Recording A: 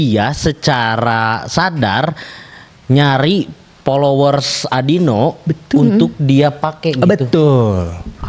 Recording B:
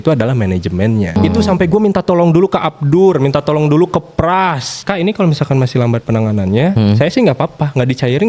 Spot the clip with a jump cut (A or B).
B